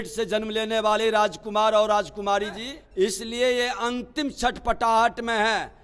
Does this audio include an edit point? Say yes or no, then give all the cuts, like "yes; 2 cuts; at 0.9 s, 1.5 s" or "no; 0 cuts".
yes; 1 cut; at 2.8 s